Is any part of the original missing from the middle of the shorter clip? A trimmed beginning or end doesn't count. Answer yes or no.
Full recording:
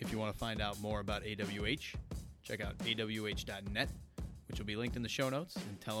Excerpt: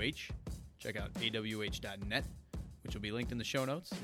no